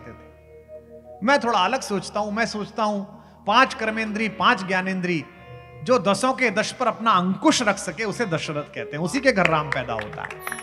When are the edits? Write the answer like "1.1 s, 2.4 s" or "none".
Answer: none